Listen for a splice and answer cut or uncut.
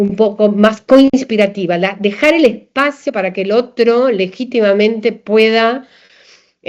uncut